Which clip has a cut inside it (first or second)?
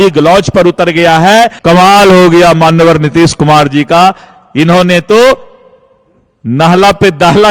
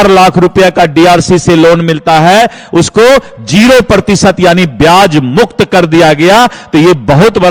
first